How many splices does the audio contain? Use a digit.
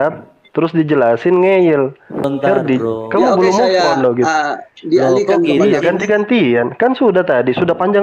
1